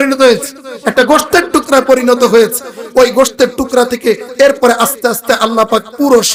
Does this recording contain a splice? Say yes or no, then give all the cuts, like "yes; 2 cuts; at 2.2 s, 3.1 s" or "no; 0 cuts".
no; 0 cuts